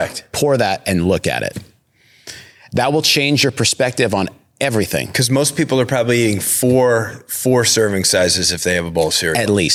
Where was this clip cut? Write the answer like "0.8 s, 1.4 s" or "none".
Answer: none